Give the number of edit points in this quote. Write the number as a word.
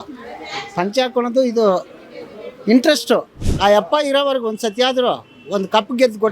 one